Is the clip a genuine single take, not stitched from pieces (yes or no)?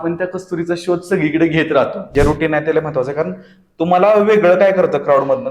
no